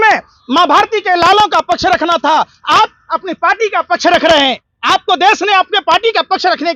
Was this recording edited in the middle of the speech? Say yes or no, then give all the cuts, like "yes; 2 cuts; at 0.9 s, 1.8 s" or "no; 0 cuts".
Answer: yes; 1 cut; at 4.7 s